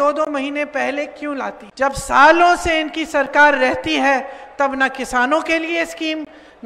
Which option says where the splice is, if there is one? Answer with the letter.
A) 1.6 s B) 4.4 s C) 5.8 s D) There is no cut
A